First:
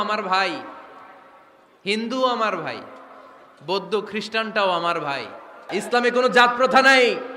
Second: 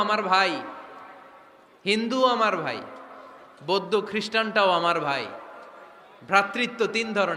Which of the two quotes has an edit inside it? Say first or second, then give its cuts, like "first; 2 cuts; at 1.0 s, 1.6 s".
first; 1 cut; at 5.7 s